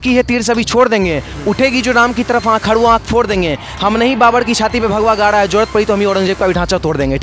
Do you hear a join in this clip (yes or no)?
no